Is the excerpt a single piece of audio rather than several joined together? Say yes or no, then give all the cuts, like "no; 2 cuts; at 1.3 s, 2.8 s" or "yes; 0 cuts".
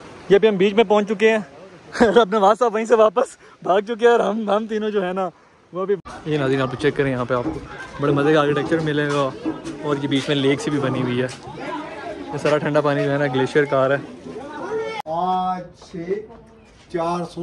no; 2 cuts; at 6.0 s, 14.9 s